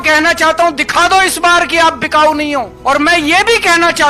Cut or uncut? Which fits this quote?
uncut